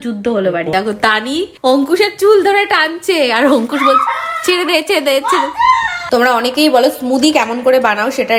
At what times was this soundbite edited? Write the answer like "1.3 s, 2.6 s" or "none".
0.7 s, 6.0 s